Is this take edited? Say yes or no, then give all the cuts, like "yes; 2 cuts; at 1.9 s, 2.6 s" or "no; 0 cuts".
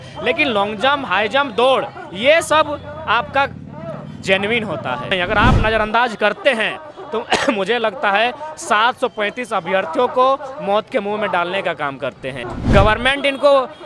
yes; 2 cuts; at 5.1 s, 12.5 s